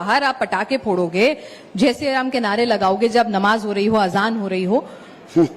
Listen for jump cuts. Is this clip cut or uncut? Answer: uncut